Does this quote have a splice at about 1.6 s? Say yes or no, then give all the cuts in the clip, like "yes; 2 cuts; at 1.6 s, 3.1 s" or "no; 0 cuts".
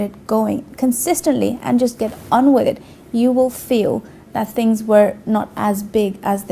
yes; 1 cut; at 1.6 s